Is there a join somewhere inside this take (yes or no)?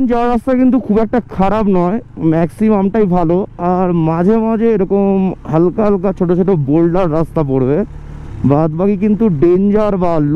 no